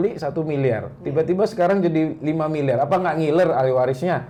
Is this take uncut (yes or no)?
yes